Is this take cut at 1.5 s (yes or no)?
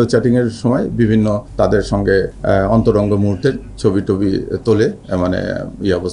yes